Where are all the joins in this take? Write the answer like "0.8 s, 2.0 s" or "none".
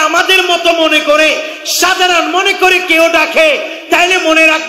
none